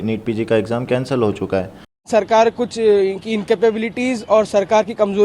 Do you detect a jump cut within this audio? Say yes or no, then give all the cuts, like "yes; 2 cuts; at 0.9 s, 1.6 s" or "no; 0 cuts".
yes; 1 cut; at 2.0 s